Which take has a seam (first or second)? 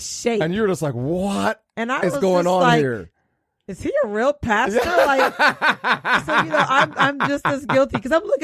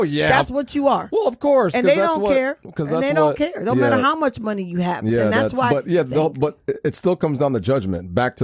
second